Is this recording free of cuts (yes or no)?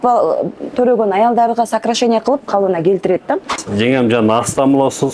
no